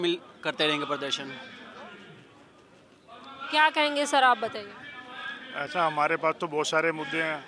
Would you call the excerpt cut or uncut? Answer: uncut